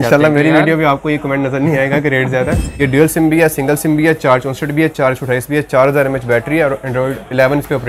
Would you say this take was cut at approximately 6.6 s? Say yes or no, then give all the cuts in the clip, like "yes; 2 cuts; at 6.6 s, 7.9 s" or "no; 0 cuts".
no; 1 cut; at 2.7 s